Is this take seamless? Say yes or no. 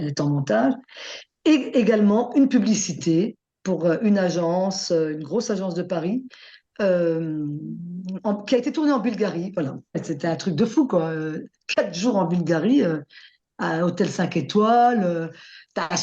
no